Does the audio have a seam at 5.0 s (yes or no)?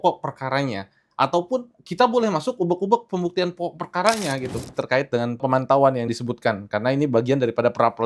yes